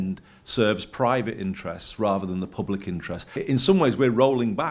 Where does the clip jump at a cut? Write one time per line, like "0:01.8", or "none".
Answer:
0:03.2